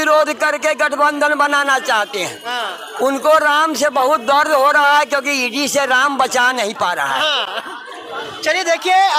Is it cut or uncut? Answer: uncut